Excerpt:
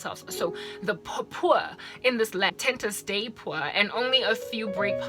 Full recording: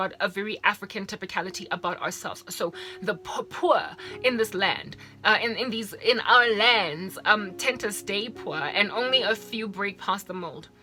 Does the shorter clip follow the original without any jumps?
no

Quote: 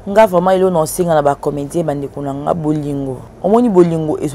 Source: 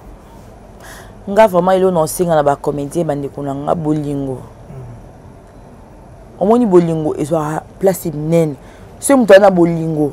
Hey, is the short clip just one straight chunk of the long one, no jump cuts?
no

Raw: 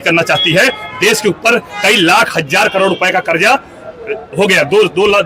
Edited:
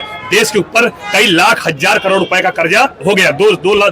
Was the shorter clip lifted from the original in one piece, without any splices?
no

